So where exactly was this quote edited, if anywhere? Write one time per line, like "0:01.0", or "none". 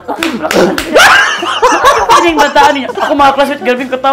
0:02.9